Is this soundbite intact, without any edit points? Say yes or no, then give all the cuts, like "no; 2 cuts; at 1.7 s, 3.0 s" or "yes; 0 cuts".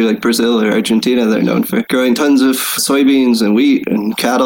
no; 1 cut; at 2.8 s